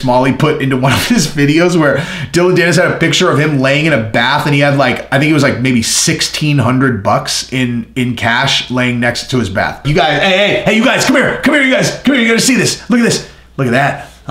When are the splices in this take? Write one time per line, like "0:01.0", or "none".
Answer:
0:09.9